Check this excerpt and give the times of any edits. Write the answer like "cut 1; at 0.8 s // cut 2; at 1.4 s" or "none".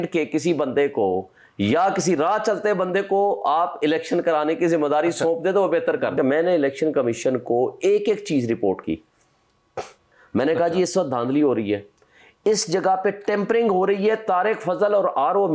cut 1; at 6.1 s